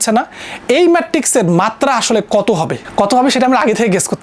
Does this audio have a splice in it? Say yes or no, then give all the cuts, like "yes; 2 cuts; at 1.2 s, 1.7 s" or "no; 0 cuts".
yes; 1 cut; at 2.8 s